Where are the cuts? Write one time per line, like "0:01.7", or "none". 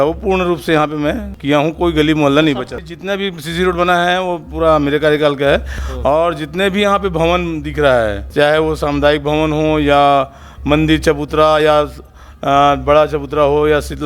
0:01.3
0:02.8
0:05.8
0:08.2